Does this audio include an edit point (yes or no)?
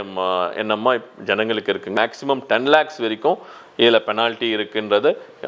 yes